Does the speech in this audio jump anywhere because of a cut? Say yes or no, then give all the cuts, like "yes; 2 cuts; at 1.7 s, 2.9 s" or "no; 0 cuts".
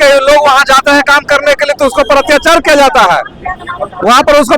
no; 0 cuts